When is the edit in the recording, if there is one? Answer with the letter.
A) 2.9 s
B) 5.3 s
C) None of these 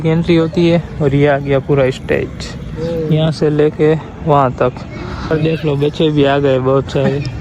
B